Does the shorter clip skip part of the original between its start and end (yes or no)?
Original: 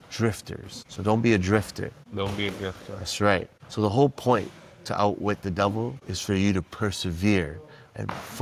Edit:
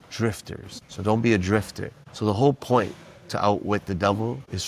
yes